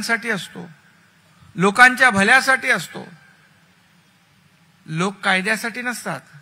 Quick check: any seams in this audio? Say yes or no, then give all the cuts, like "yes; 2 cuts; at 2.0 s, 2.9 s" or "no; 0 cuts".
no; 0 cuts